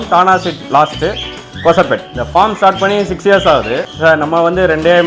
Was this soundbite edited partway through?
yes; 2 cuts; at 2.2 s, 3.9 s

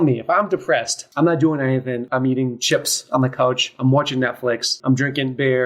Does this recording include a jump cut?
yes; 3 cuts; at 1.0 s, 2.1 s, 4.7 s

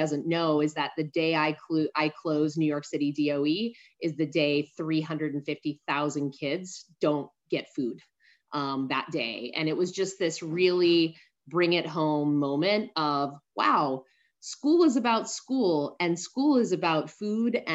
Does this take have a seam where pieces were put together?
no; 0 cuts

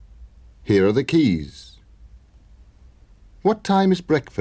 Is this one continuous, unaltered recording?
no; 1 cut; at 2.1 s

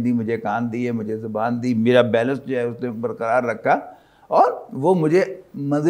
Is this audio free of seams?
yes; 0 cuts

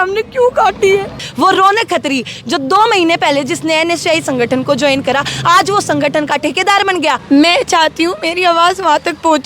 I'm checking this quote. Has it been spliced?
yes; 2 cuts; at 1.2 s, 7.2 s

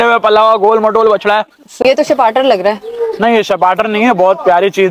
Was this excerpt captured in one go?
no; 1 cut; at 1.8 s

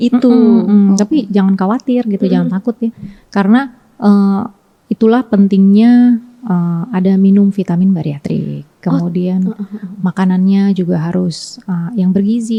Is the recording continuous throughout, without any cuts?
yes; 0 cuts

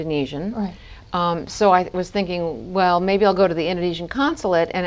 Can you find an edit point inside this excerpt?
no; 0 cuts

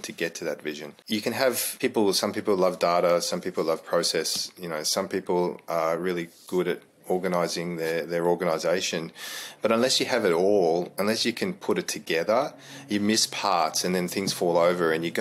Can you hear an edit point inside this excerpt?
yes; 2 cuts; at 0.9 s, 1.7 s

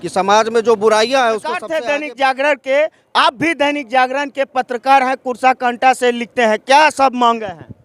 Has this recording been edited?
yes; 1 cut; at 1.7 s

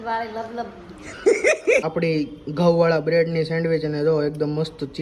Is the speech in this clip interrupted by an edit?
yes; 2 cuts; at 1.0 s, 1.9 s

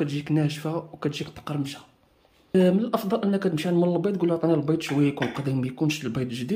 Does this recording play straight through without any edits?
no; 1 cut; at 2.5 s

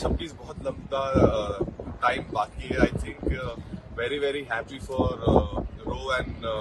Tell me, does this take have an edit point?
no; 0 cuts

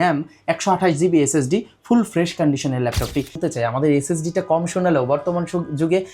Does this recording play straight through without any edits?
no; 1 cut; at 3.4 s

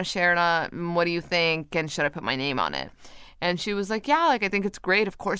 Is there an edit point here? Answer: no; 0 cuts

